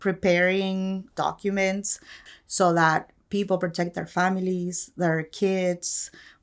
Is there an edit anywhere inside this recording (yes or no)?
yes